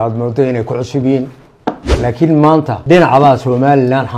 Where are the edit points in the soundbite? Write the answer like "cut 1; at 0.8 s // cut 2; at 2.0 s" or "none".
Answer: cut 1; at 1.9 s // cut 2; at 2.8 s